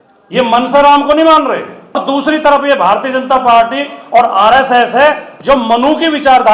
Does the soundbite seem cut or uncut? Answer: cut